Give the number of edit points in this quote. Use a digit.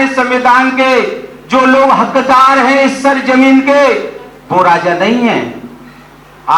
0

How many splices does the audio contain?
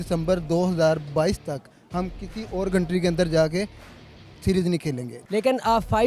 1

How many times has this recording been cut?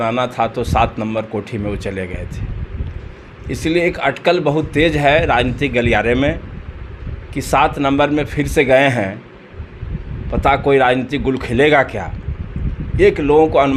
0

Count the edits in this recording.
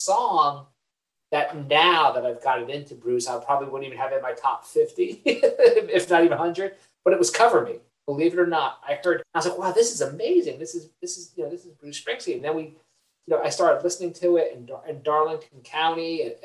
1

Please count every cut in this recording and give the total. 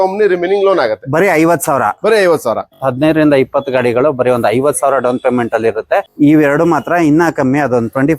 2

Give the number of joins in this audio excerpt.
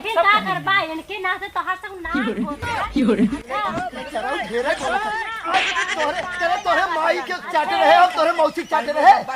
1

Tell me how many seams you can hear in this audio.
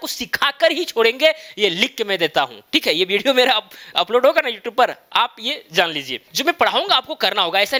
0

